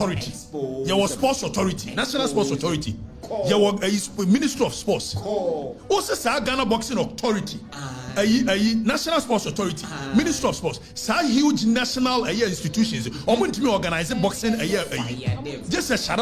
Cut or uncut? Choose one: uncut